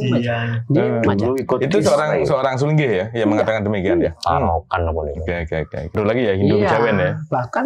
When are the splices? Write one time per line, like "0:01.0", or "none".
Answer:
0:06.0